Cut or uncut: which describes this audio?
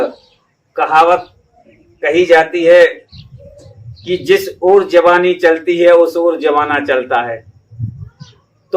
uncut